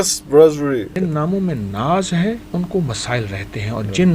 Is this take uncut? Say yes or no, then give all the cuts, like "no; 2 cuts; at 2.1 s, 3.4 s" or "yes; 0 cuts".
no; 2 cuts; at 0.9 s, 2.4 s